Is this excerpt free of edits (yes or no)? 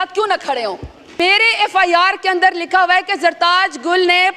no